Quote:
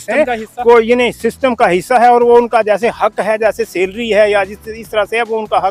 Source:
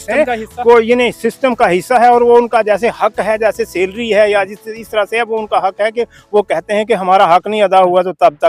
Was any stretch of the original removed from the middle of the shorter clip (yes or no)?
no